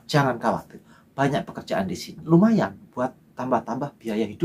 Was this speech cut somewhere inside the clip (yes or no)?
yes